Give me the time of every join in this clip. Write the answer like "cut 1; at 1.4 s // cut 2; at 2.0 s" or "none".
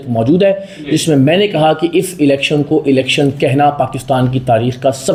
none